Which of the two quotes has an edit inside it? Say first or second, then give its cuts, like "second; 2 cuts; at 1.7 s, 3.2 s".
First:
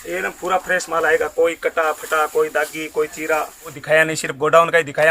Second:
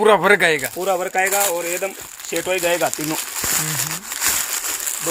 first; 1 cut; at 3.8 s